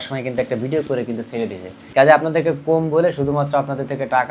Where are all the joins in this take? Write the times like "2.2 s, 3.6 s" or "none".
1.7 s